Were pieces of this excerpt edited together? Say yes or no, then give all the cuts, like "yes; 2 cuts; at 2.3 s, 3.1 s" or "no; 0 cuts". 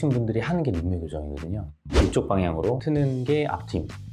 yes; 2 cuts; at 1.7 s, 2.8 s